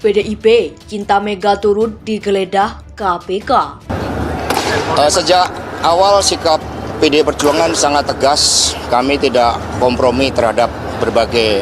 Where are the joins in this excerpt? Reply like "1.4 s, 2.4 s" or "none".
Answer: 3.7 s